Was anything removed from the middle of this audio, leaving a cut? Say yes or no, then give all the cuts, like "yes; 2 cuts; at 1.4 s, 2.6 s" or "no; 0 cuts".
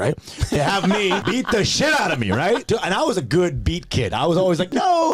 yes; 2 cuts; at 1.2 s, 2.6 s